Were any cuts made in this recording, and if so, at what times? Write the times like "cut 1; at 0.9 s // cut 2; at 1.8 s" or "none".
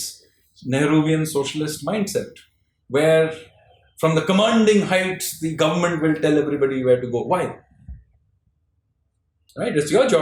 none